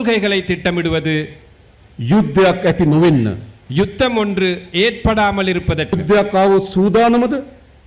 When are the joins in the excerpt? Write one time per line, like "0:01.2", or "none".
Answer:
0:05.9